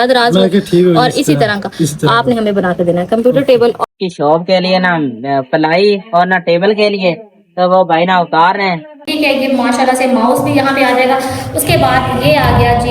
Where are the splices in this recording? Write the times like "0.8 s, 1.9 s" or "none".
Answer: 3.8 s, 9.1 s